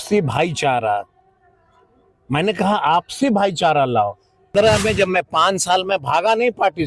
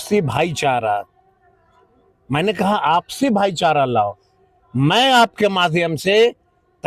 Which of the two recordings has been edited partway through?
first; 1 cut; at 4.5 s

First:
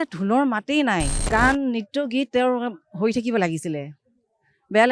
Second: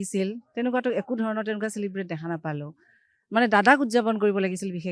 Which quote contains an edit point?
first; 1 cut; at 1.2 s

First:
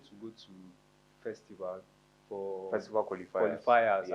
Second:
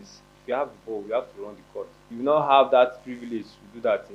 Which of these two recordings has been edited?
second; 1 cut; at 2.0 s

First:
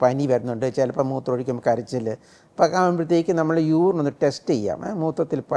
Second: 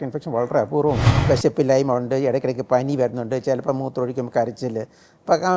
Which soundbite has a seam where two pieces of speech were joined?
second; 1 cut; at 1.1 s

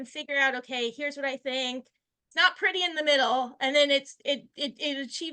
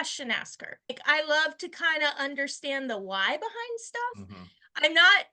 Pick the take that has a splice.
second; 1 cut; at 1.0 s

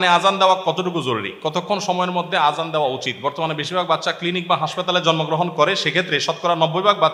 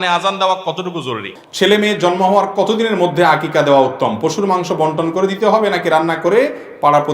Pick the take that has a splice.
second; 1 cut; at 1.3 s

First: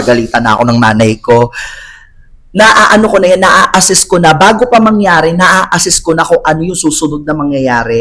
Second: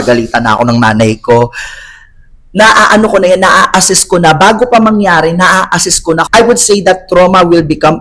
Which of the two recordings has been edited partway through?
second; 1 cut; at 6.2 s

